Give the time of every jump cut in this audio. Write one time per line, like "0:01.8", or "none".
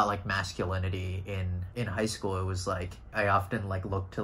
0:01.6
0:03.1